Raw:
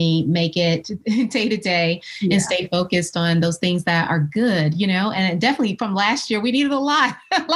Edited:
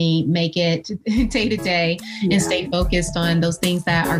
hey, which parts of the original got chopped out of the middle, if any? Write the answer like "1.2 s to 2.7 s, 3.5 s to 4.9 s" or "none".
none